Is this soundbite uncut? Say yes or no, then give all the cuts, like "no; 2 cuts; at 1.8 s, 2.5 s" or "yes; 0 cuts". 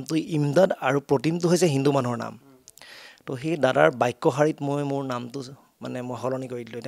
yes; 0 cuts